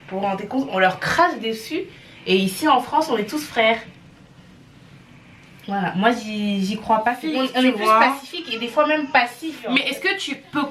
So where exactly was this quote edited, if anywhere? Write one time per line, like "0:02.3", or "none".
0:07.2
0:09.5